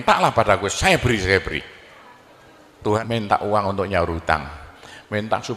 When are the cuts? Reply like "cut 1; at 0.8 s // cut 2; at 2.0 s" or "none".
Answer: cut 1; at 3.0 s